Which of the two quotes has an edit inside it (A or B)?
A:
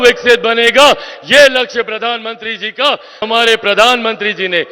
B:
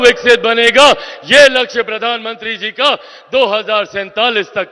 A